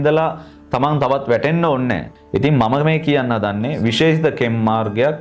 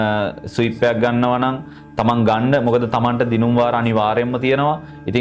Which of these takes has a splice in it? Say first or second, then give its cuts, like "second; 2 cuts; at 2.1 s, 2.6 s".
first; 1 cut; at 2.1 s